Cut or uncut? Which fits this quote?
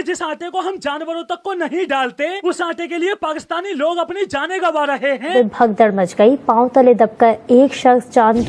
cut